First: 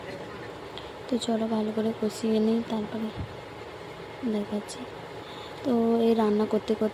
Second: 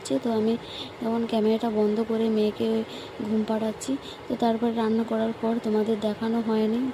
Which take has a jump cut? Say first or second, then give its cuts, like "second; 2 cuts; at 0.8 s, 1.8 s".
first; 1 cut; at 4.4 s